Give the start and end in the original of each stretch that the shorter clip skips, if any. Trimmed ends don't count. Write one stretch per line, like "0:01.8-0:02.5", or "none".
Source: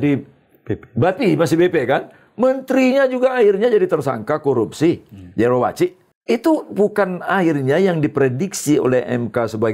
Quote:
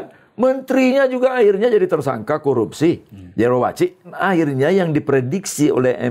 0:06.1-0:07.2